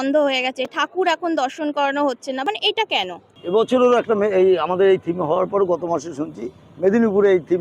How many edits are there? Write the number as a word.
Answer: one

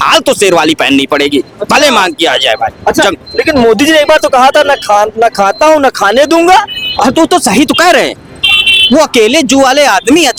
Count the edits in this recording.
zero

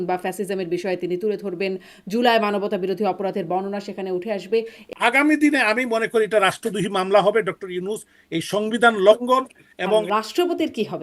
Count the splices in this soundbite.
two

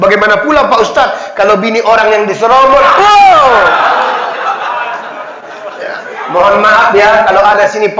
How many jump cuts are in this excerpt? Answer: zero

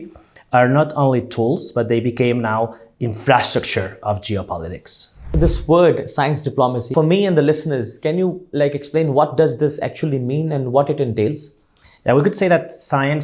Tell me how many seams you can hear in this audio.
two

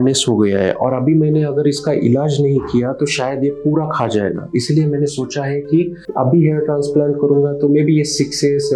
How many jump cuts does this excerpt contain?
zero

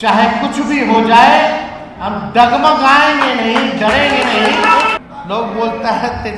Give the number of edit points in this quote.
one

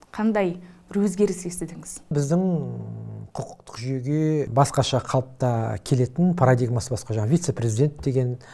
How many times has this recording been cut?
two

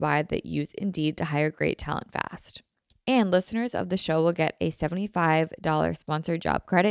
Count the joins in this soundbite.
zero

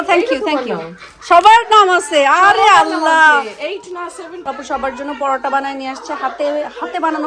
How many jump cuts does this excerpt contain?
one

